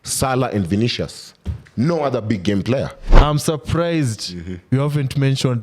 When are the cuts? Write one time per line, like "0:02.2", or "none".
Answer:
0:03.0